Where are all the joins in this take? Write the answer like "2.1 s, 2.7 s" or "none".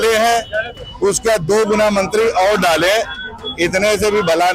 none